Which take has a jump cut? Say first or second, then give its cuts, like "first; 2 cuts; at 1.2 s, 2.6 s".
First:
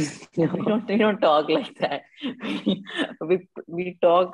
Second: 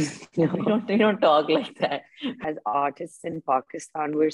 second; 1 cut; at 2.4 s